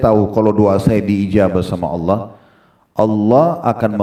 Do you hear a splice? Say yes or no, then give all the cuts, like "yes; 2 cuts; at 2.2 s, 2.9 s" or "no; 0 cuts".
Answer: no; 0 cuts